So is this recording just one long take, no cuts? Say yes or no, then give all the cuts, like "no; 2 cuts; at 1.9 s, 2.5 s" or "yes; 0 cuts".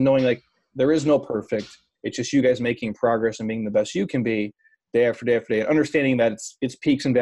yes; 0 cuts